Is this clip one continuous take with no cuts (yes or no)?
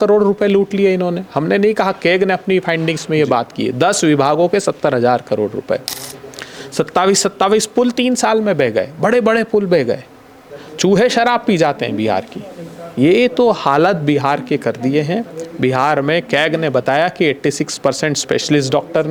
yes